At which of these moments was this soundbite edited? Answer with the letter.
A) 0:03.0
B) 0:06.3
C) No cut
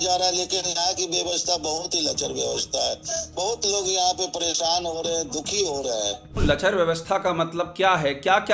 B